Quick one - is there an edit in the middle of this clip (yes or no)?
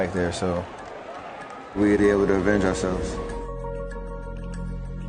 yes